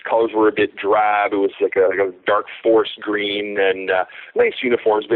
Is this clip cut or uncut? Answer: uncut